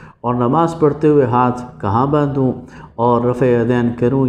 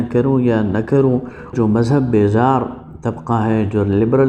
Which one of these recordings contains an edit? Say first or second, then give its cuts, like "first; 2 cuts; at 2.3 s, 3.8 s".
second; 1 cut; at 1.5 s